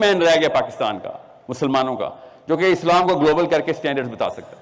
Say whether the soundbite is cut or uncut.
uncut